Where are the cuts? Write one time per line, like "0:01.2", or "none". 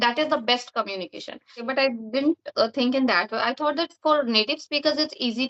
0:01.6